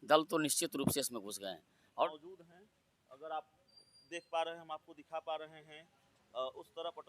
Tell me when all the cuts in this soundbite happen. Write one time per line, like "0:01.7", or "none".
0:02.0